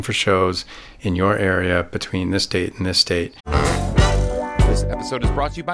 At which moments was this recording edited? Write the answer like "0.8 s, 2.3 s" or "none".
3.4 s